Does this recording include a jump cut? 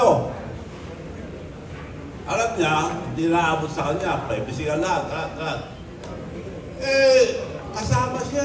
no; 0 cuts

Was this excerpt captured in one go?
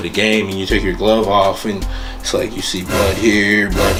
yes; 0 cuts

